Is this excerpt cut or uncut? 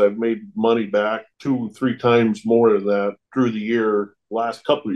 uncut